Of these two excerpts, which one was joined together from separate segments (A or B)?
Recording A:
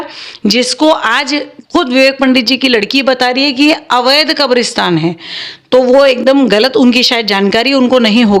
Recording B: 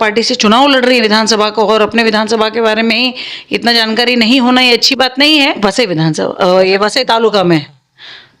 B